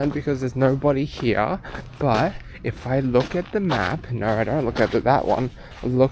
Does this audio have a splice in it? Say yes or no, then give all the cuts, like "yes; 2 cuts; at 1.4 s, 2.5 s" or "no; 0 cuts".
no; 0 cuts